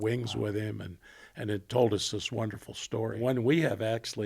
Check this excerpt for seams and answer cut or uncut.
cut